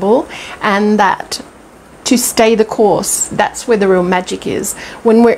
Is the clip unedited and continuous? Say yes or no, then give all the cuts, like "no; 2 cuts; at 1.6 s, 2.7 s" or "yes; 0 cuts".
yes; 0 cuts